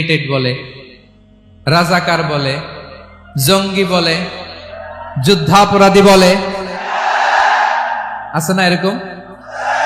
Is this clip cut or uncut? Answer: uncut